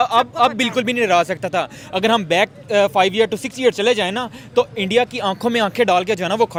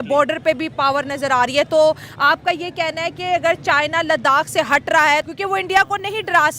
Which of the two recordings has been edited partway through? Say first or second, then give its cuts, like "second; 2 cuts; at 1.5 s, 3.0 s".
second; 1 cut; at 5.3 s